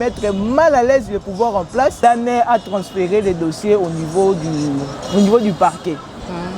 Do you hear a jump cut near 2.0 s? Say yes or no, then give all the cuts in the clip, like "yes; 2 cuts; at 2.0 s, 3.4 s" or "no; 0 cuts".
yes; 1 cut; at 2.0 s